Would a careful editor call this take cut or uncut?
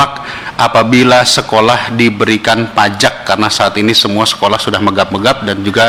uncut